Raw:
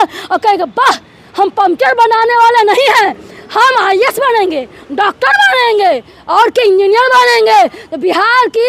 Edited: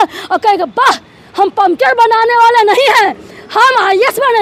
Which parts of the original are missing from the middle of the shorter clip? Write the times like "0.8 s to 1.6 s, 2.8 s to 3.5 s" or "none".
none